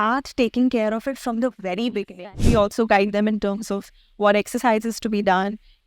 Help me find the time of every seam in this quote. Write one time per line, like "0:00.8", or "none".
0:02.4